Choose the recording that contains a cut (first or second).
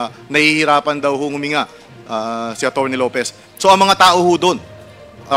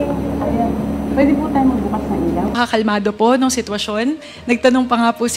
second